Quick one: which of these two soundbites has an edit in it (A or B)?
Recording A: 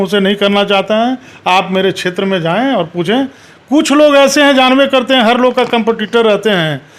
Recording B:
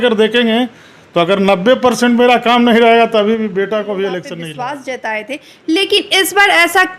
B